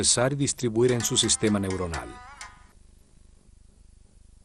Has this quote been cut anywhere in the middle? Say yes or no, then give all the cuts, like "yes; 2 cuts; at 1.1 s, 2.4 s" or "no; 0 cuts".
no; 0 cuts